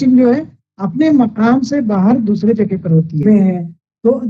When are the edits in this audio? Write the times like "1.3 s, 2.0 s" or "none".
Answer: 3.2 s